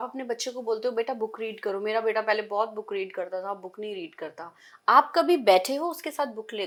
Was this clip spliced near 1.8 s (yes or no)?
no